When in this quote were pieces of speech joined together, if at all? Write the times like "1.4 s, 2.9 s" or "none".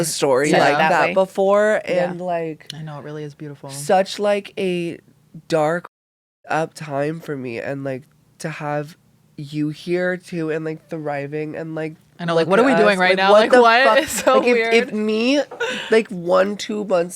none